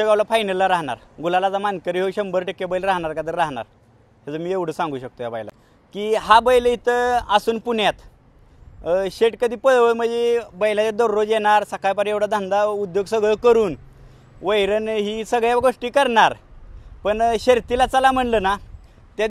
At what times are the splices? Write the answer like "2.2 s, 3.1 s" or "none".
5.5 s